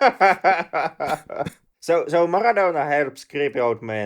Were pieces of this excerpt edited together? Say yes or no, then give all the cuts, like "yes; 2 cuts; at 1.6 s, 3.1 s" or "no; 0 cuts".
yes; 1 cut; at 1.7 s